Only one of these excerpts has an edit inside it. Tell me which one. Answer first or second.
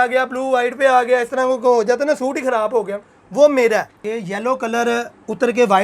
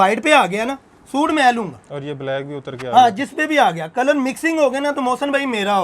first